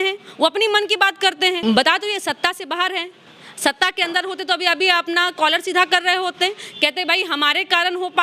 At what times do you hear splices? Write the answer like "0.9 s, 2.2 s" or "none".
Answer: 1.6 s